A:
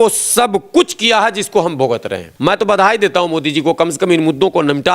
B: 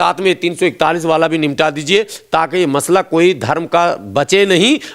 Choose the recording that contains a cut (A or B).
A